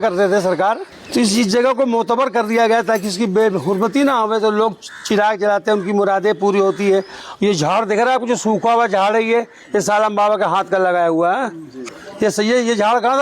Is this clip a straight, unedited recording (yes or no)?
no